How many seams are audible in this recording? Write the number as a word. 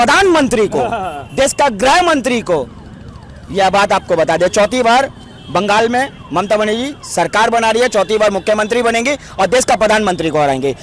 zero